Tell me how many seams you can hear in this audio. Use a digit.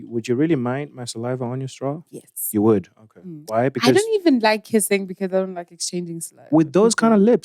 0